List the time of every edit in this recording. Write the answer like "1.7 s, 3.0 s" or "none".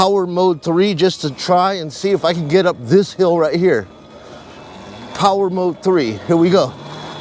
none